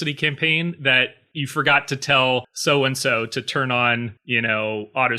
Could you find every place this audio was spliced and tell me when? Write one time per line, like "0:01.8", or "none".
0:01.2
0:02.5
0:04.2